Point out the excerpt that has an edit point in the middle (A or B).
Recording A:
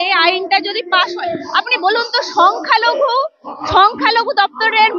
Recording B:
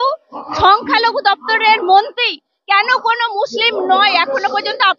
A